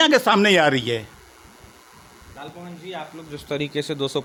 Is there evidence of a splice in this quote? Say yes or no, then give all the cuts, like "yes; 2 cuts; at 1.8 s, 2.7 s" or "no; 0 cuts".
no; 0 cuts